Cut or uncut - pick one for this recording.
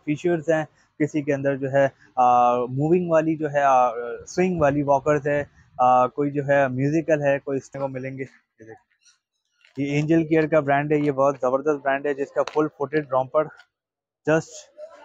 cut